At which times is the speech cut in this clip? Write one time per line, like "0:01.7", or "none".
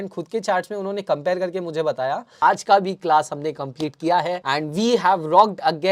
0:02.3
0:04.4

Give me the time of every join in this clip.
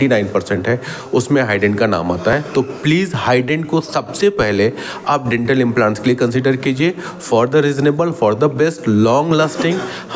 none

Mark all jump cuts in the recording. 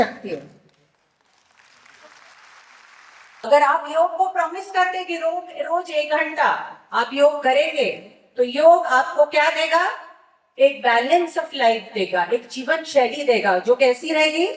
0:03.5

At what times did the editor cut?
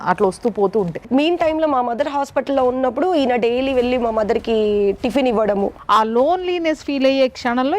0:01.0
0:05.8

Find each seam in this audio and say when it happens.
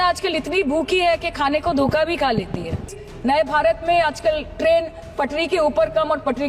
0:03.0

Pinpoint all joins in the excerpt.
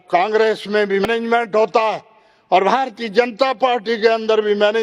0:01.1

